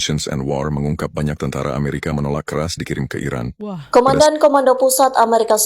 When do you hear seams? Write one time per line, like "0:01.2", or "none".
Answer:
0:03.9